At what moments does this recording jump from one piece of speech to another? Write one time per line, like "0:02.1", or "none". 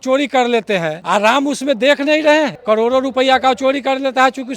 0:01.0
0:02.6